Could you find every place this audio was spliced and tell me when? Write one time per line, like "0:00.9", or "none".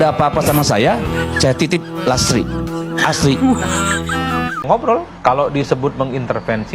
0:04.6